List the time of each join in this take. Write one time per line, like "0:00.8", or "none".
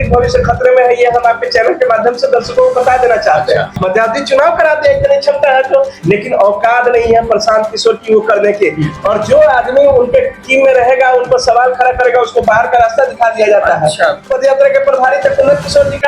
0:03.8
0:08.9
0:14.3

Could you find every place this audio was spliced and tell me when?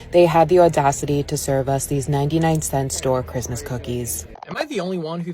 0:04.4

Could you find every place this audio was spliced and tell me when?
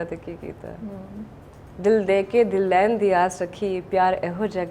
none

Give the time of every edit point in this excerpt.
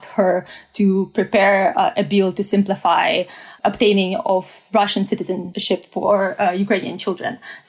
0:03.4
0:05.5

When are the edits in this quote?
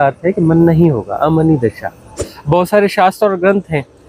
0:02.3

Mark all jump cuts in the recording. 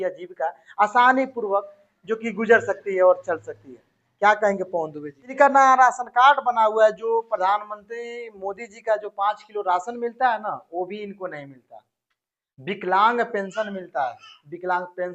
0:05.3

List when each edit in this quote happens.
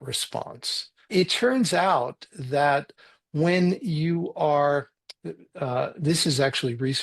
0:01.1
0:03.0

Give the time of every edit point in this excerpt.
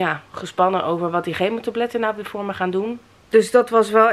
0:03.1

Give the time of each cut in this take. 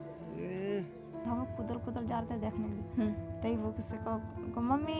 0:01.2

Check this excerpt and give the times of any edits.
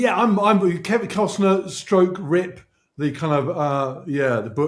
none

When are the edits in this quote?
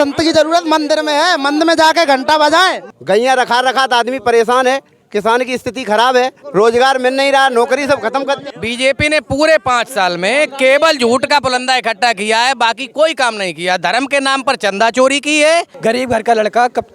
0:02.9
0:06.4
0:08.5
0:15.7

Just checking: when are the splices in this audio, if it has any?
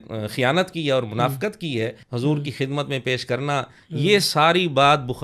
0:02.0

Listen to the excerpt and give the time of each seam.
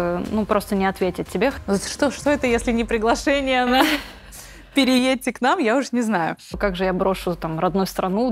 0:01.6
0:06.6

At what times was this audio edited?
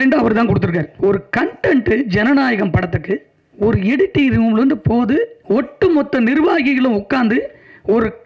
0:00.9
0:03.4
0:05.4

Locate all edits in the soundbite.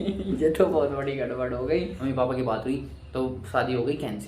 0:01.9

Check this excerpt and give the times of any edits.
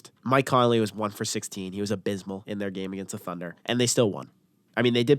0:02.4
0:03.5

